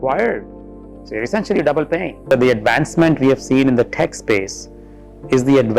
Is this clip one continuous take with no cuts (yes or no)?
no